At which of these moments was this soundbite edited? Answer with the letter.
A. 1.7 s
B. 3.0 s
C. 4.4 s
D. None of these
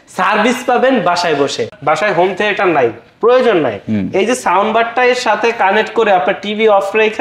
A